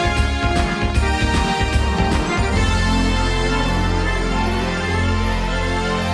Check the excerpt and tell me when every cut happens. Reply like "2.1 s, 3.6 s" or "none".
none